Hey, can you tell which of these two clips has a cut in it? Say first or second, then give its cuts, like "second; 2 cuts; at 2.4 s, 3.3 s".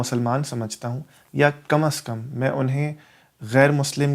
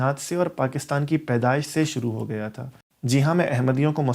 second; 1 cut; at 2.6 s